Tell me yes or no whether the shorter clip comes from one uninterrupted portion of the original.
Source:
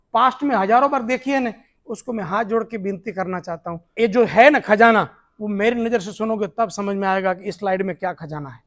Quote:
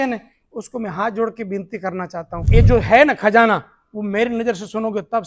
no